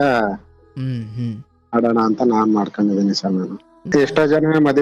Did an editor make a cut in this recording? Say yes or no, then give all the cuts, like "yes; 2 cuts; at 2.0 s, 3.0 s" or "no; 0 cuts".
yes; 1 cut; at 3.8 s